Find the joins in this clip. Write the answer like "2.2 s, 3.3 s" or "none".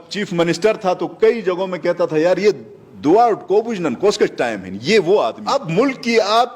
5.7 s